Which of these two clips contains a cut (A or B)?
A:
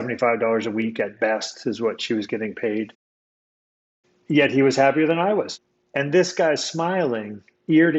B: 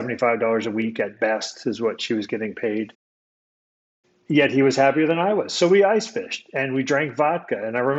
A